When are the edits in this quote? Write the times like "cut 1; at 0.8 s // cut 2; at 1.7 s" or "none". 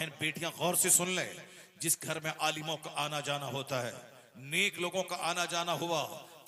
none